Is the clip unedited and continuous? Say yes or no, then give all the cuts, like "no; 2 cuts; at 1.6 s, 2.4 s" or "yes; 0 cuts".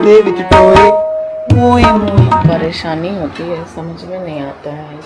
yes; 0 cuts